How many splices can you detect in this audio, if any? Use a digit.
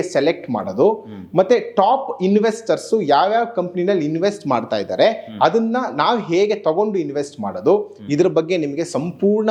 0